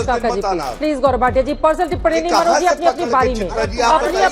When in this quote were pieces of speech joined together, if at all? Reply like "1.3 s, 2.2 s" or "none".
none